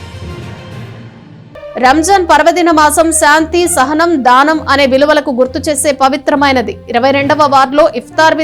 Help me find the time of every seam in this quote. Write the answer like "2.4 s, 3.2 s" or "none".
1.5 s